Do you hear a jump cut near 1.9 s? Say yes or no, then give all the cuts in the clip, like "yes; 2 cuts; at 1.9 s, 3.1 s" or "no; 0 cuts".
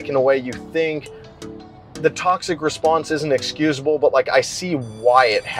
no; 0 cuts